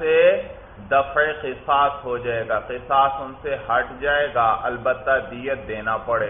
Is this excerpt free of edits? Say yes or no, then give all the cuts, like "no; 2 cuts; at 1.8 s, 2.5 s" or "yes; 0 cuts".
yes; 0 cuts